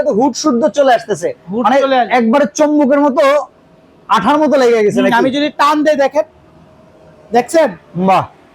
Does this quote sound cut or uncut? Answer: uncut